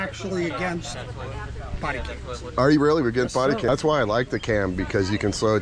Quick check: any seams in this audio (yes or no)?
yes